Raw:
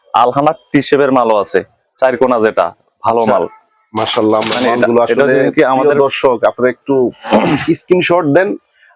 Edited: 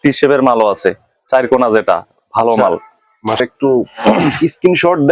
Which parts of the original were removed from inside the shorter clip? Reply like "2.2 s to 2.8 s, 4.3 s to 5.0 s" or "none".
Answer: 4.1 s to 6.7 s